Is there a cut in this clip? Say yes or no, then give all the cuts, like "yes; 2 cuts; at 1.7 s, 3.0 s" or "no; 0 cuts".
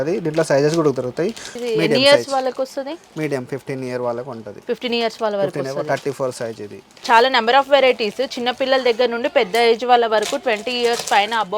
yes; 2 cuts; at 1.5 s, 6.9 s